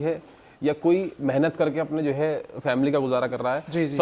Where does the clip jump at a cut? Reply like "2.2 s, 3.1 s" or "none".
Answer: none